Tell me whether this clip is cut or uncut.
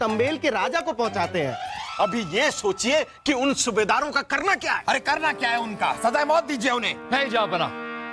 cut